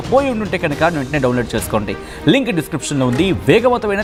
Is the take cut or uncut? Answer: uncut